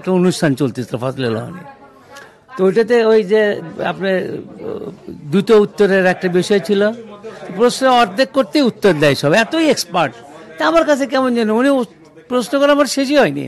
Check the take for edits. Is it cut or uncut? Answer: uncut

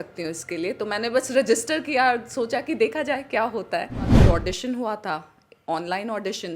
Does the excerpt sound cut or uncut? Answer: cut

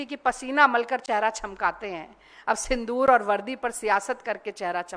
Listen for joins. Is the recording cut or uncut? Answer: uncut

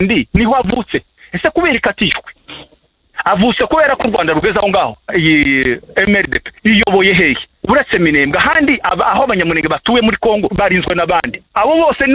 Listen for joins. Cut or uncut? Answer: uncut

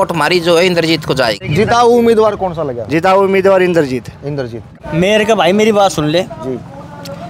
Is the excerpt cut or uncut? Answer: cut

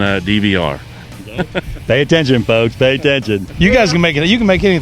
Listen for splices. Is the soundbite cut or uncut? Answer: cut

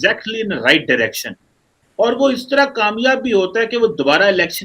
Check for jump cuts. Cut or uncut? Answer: uncut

